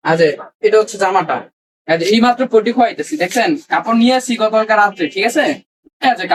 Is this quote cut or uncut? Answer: uncut